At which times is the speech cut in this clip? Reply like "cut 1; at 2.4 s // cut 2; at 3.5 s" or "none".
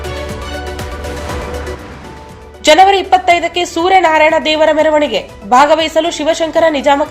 cut 1; at 2.4 s